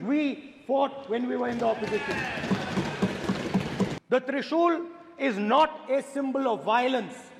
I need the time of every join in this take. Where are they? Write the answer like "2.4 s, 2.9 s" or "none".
4.0 s

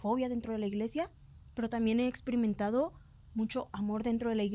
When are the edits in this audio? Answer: none

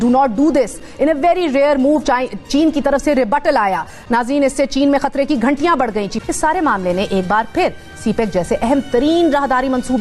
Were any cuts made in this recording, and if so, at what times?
3.9 s, 6.2 s

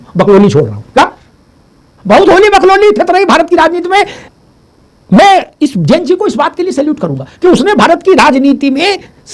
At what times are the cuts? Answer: none

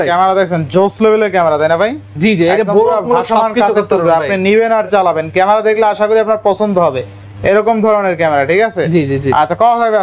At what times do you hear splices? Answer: none

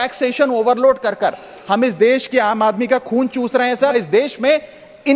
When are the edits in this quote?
3.9 s

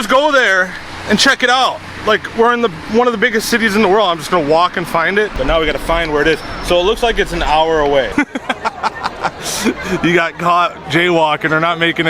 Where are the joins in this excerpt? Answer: 5.4 s, 8.1 s

